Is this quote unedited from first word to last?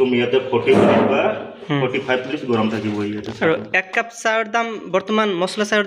yes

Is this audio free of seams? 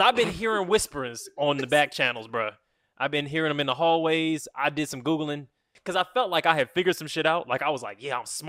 no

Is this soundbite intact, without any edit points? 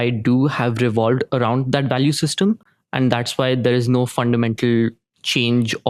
yes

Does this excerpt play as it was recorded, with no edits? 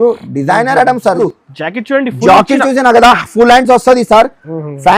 no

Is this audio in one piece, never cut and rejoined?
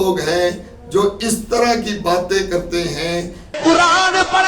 no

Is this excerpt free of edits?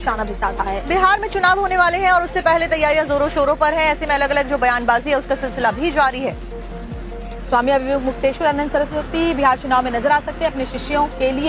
no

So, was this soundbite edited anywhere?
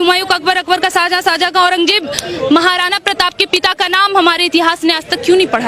no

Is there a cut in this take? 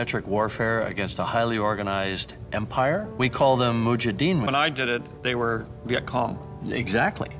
yes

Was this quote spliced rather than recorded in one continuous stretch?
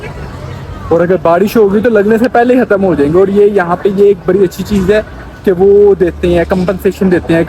no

